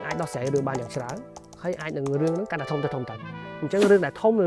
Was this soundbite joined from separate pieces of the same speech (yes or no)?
no